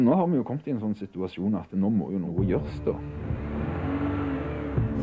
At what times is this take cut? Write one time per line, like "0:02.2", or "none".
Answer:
0:02.3